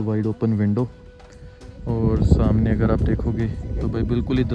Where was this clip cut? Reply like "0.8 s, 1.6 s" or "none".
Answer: none